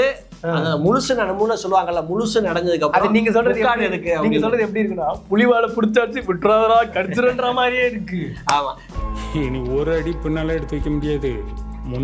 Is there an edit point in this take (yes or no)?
no